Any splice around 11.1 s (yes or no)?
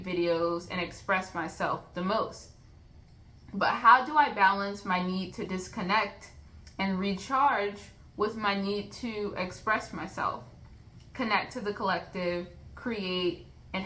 no